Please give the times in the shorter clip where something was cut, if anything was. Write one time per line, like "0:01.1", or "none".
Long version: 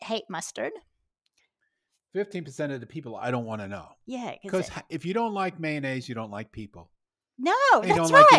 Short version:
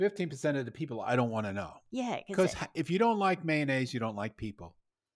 none